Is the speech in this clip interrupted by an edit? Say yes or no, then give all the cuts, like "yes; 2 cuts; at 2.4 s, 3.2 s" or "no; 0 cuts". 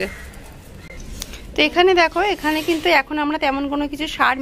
no; 0 cuts